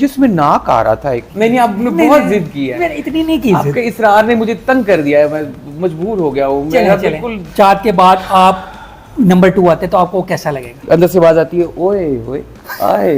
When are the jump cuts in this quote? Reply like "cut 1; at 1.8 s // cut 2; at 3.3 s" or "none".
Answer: cut 1; at 1.3 s // cut 2; at 7.4 s // cut 3; at 10.8 s